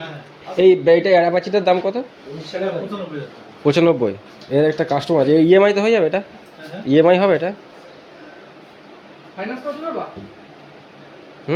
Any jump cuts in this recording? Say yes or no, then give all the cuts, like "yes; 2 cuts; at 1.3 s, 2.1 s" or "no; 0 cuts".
no; 0 cuts